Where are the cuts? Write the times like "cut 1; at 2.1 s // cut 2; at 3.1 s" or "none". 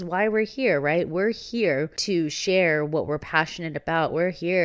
cut 1; at 2.0 s

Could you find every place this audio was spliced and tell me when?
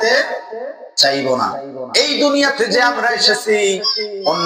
cut 1; at 1.8 s

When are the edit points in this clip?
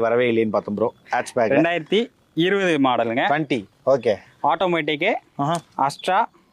none

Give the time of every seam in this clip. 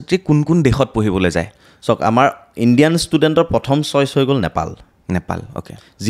none

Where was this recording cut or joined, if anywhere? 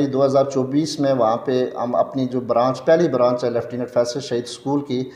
none

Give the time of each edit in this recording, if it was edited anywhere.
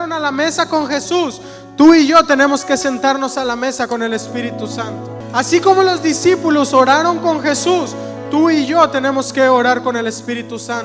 cut 1; at 5.2 s

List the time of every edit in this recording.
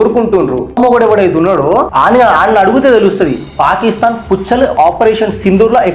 cut 1; at 0.8 s // cut 2; at 1.9 s // cut 3; at 4.7 s

